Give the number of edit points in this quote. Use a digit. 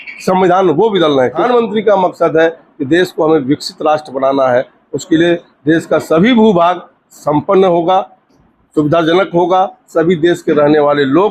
1